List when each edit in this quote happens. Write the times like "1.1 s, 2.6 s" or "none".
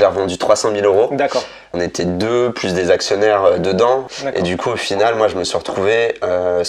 1.7 s, 4.1 s